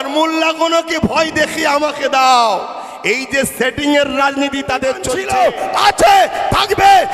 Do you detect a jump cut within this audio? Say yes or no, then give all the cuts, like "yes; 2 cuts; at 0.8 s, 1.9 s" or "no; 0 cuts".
yes; 1 cut; at 5.1 s